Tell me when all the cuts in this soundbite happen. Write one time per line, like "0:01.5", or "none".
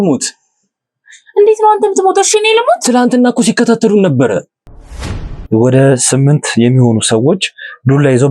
0:05.0